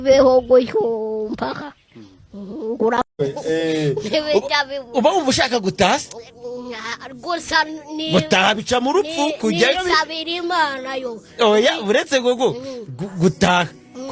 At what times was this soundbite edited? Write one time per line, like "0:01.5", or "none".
0:03.1